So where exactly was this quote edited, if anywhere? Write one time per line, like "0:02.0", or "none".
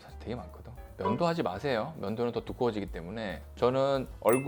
none